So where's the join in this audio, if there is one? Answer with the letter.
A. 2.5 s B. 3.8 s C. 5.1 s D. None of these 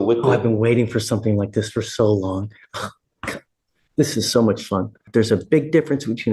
C